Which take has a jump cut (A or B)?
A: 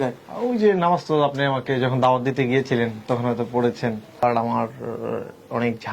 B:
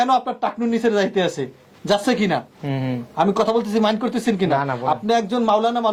A